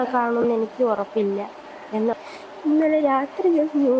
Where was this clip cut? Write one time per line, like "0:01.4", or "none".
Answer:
0:02.1